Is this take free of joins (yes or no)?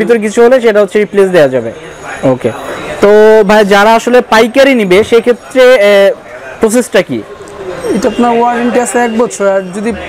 yes